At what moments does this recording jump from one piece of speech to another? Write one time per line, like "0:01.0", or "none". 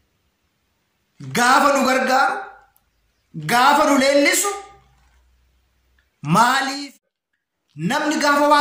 0:06.8